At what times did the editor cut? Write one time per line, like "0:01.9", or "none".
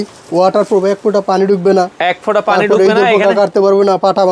none